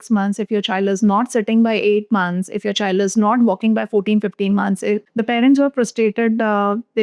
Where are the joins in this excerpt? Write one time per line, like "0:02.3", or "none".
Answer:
0:05.1